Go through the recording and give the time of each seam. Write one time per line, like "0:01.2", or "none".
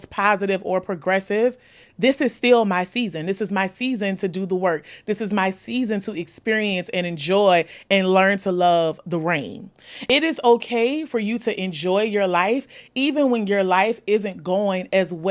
0:09.9

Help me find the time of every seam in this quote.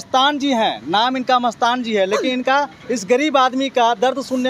none

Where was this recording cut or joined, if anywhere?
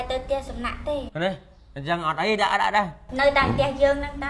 none

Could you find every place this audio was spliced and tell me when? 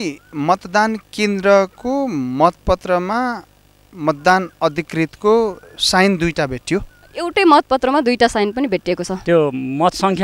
0:09.1

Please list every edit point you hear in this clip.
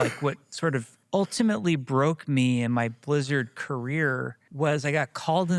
0:01.0
0:04.4

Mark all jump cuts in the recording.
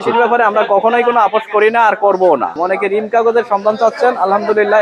0:02.6

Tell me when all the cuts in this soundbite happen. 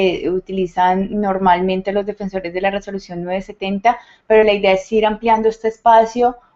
0:04.3

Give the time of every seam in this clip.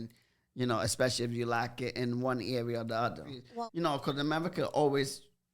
0:03.2

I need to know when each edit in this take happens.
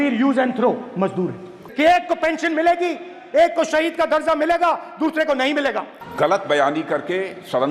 none

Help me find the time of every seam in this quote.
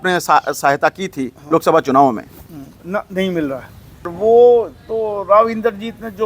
0:04.1

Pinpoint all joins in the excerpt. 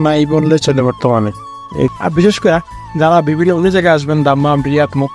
0:01.9

